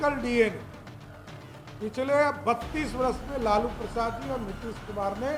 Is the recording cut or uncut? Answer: uncut